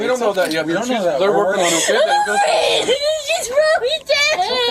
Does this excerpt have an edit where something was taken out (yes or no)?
no